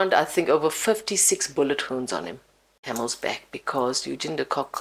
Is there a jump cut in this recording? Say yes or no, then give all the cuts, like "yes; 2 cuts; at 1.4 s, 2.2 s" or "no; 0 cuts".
yes; 1 cut; at 2.8 s